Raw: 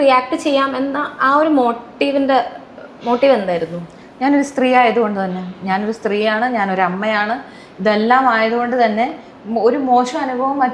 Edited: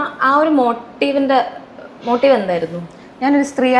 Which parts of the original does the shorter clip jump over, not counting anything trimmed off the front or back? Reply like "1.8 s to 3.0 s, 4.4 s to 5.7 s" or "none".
none